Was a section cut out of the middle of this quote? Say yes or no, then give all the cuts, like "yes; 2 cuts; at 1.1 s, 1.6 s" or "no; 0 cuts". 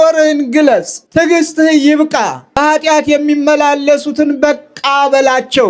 yes; 2 cuts; at 1.0 s, 2.5 s